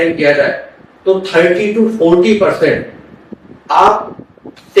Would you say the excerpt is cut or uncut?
uncut